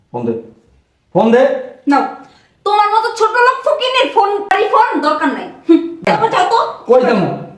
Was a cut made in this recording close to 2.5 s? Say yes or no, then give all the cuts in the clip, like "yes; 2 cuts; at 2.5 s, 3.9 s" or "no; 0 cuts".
no; 2 cuts; at 4.5 s, 6.0 s